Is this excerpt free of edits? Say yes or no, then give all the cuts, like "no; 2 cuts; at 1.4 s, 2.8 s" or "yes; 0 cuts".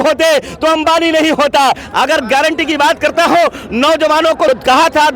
no; 2 cuts; at 1.8 s, 4.5 s